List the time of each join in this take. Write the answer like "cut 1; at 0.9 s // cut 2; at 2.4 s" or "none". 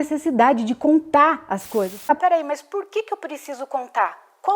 cut 1; at 2.1 s